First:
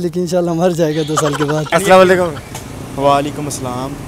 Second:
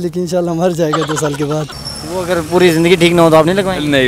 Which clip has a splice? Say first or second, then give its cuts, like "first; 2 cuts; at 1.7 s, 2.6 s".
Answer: second; 1 cut; at 1.6 s